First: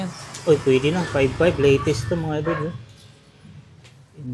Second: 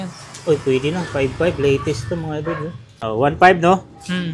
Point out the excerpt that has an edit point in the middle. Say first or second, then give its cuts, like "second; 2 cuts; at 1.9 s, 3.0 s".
second; 1 cut; at 2.9 s